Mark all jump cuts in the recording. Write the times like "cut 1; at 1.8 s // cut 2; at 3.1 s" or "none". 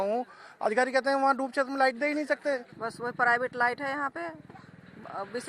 cut 1; at 2.8 s